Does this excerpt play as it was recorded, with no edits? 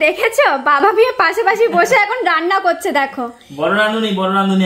yes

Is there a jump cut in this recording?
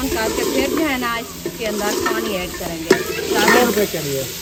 no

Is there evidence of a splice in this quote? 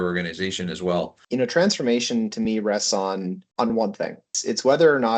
yes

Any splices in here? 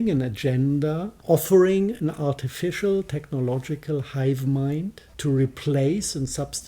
yes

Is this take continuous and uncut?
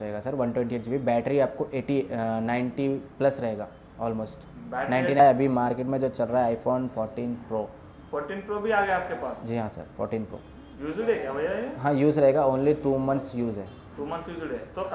no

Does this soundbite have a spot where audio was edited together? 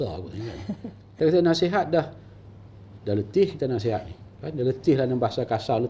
yes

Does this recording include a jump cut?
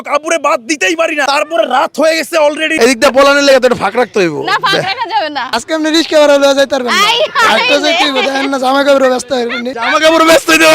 yes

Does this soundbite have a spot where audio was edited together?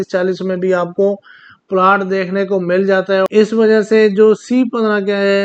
yes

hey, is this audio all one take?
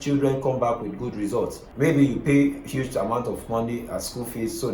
no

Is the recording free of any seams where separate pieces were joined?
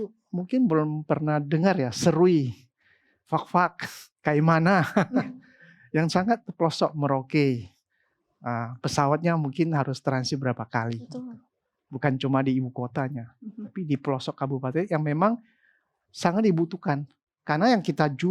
yes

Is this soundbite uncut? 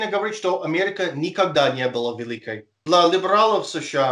no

